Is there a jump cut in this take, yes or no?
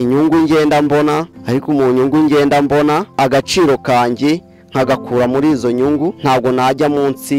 yes